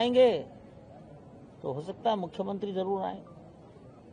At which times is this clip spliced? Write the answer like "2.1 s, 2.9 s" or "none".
none